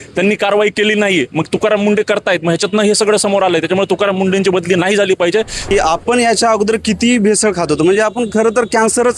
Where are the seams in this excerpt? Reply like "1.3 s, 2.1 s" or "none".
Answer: 5.6 s